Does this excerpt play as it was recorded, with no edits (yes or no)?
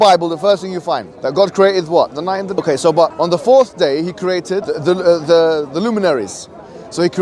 no